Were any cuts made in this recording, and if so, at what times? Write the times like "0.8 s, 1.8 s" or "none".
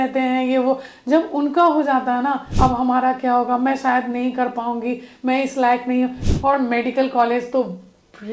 2.5 s, 6.2 s